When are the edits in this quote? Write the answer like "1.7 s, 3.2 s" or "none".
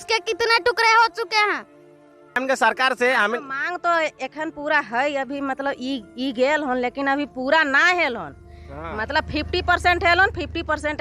2.4 s